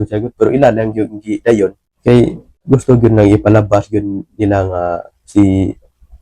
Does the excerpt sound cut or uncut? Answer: cut